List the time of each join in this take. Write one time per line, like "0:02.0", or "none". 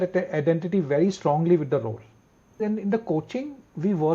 0:02.6